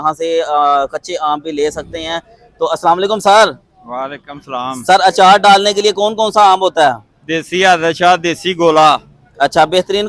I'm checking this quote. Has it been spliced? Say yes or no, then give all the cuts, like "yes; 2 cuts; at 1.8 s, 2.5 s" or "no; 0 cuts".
no; 0 cuts